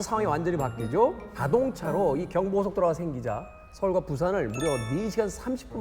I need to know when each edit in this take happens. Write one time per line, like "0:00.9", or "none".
0:01.3